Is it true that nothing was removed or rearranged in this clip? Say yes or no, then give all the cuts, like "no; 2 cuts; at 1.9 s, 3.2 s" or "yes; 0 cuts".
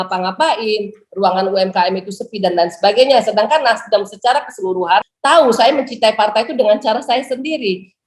no; 1 cut; at 5.1 s